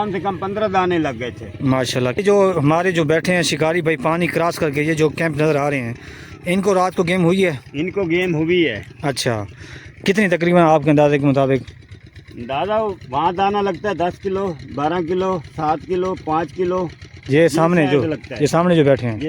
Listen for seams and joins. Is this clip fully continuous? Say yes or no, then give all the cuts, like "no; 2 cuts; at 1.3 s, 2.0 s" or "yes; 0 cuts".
no; 1 cut; at 2.2 s